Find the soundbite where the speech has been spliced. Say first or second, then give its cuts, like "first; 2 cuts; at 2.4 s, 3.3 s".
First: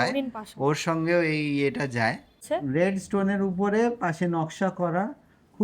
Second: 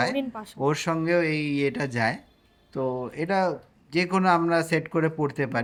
first; 1 cut; at 2.4 s